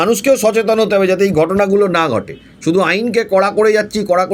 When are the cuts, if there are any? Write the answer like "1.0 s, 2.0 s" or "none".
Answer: none